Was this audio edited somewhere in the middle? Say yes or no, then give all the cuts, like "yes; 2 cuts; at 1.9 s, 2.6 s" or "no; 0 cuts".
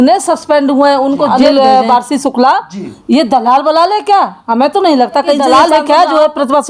yes; 2 cuts; at 1.3 s, 5.4 s